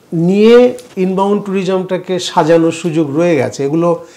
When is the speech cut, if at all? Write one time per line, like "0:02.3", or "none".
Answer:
none

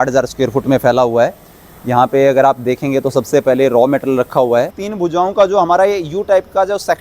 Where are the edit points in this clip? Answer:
0:04.8

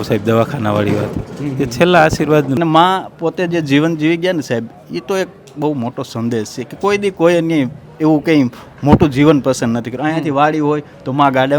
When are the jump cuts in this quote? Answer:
0:02.6

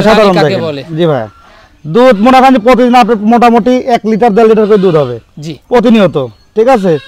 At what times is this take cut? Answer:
none

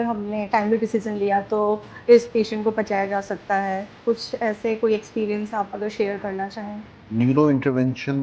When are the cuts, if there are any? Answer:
0:06.9

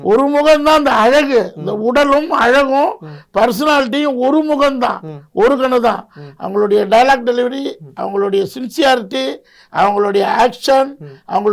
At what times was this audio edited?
none

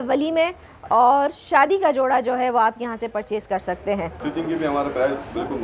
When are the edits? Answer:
0:04.2

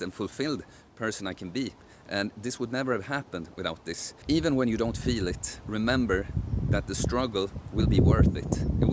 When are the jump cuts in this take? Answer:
0:04.1

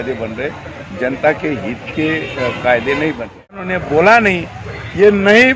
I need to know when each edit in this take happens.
0:03.7

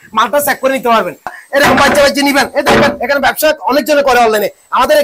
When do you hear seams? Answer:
0:01.4

